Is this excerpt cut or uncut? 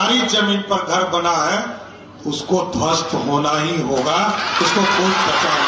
uncut